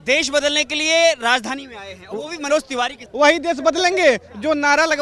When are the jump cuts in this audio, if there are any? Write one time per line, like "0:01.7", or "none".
0:03.0